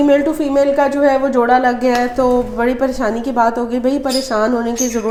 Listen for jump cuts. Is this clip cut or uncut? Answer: uncut